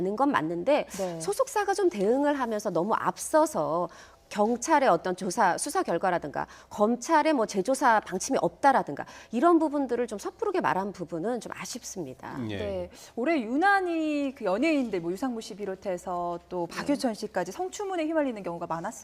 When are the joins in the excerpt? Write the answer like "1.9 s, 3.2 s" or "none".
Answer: 8.0 s